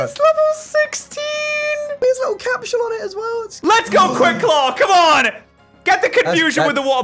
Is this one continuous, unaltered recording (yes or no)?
no